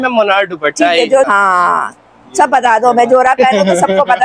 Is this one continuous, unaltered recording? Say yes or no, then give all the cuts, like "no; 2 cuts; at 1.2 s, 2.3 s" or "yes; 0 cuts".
no; 1 cut; at 1.3 s